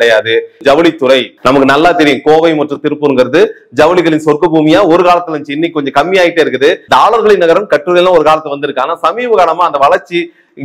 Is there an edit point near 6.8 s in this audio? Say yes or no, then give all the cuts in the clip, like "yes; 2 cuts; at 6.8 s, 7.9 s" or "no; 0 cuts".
yes; 1 cut; at 6.8 s